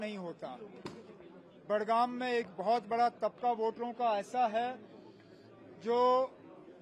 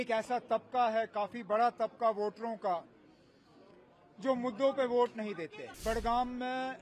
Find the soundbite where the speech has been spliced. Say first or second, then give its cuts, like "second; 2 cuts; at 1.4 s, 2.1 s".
second; 1 cut; at 5.6 s